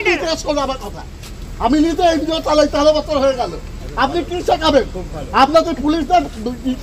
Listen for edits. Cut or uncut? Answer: uncut